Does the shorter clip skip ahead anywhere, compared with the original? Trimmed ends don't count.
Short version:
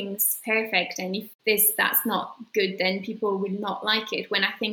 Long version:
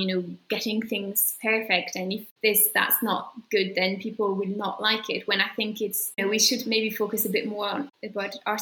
no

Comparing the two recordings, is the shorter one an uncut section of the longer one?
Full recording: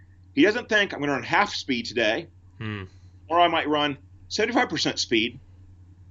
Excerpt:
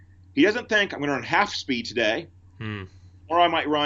yes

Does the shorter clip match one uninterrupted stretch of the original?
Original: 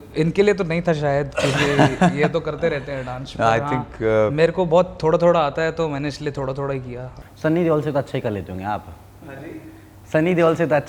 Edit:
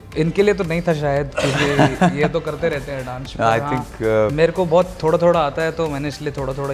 yes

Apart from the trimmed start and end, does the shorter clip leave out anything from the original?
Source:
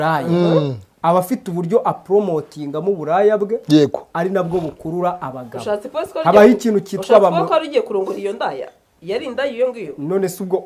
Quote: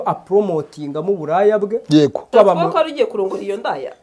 yes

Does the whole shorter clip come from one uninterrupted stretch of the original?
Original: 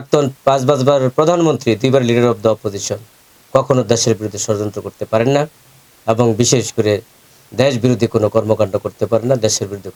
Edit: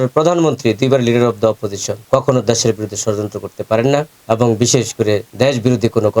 no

